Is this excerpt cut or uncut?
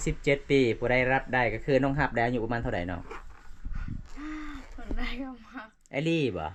uncut